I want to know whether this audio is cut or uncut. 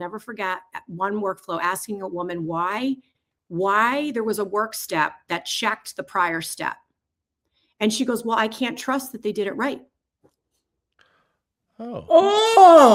uncut